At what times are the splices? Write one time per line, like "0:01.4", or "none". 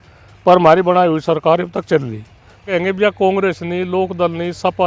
0:02.7